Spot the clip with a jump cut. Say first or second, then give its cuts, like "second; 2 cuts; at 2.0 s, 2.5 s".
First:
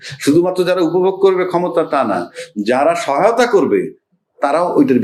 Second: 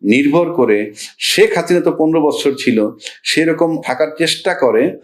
second; 1 cut; at 3.8 s